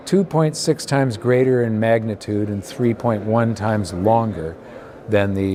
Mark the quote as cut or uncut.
uncut